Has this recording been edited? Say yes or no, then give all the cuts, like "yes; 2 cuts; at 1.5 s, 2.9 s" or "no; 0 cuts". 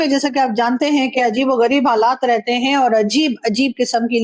no; 0 cuts